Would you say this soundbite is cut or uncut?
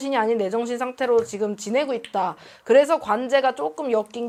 uncut